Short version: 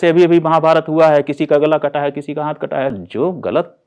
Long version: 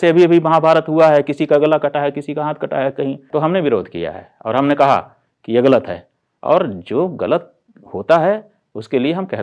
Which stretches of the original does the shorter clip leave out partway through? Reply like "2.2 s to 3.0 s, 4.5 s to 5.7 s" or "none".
2.9 s to 6.7 s